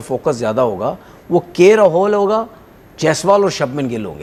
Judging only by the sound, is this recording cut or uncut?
uncut